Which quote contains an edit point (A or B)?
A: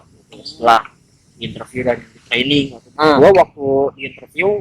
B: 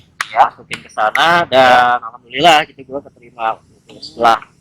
A